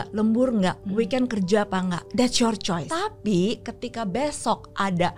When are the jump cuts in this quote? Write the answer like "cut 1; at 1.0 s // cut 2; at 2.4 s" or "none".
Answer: cut 1; at 2.0 s // cut 2; at 2.9 s